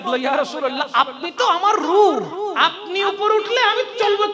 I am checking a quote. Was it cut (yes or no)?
yes